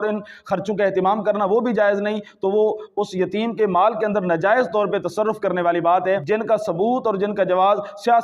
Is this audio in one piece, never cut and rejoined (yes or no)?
no